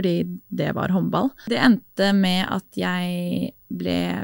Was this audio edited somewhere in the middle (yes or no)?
yes